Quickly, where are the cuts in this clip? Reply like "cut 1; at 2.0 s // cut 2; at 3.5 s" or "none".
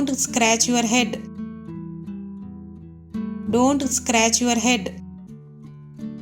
cut 1; at 1.3 s // cut 2; at 3.4 s // cut 3; at 5.2 s